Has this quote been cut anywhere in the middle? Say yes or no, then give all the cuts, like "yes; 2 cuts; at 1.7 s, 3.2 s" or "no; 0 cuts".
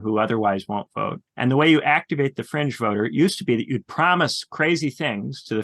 yes; 1 cut; at 1.2 s